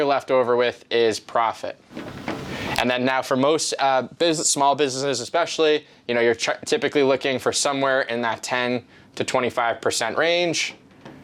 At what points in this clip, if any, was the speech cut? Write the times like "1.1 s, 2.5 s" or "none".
none